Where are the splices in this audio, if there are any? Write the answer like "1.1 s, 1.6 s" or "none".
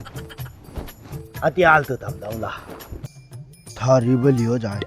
3.1 s